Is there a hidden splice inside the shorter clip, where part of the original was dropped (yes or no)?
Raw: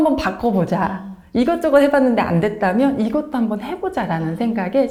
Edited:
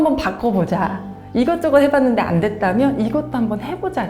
no